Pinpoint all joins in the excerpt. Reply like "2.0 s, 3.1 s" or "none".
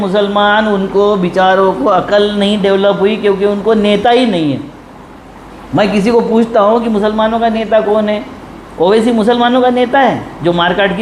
none